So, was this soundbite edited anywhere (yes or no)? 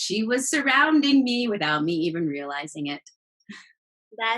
no